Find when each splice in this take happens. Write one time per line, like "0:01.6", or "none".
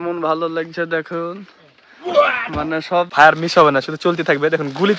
0:03.1